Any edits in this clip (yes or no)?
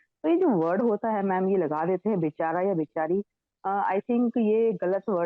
no